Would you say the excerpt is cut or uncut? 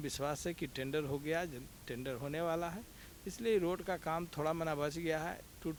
uncut